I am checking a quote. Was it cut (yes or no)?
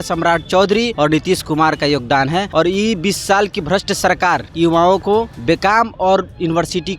yes